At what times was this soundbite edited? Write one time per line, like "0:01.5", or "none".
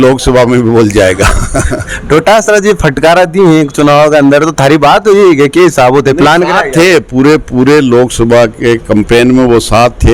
none